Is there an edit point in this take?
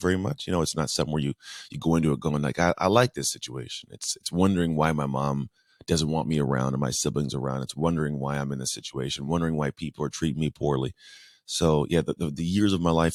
no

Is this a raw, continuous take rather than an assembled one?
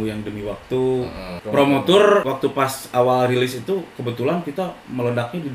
no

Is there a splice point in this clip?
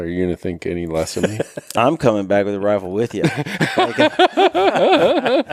no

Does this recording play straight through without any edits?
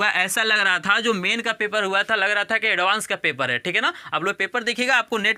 yes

